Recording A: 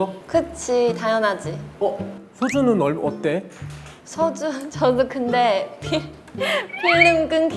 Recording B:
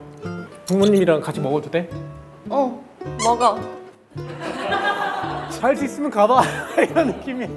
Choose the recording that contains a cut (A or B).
B